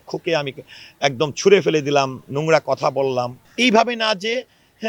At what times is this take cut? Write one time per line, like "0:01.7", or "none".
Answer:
0:03.4